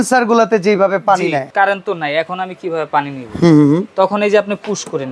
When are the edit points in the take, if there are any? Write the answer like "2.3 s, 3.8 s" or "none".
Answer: 1.5 s